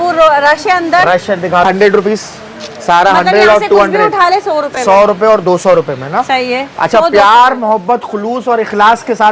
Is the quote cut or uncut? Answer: uncut